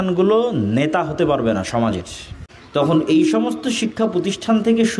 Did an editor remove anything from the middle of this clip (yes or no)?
yes